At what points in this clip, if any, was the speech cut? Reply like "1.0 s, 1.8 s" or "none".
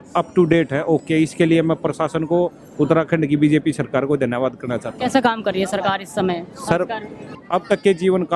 7.4 s